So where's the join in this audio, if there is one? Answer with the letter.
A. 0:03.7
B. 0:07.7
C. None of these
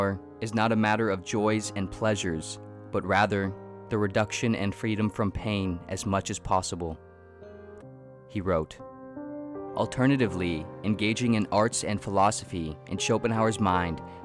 B